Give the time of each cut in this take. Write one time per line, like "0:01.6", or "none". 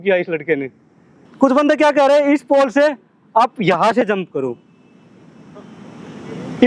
0:01.2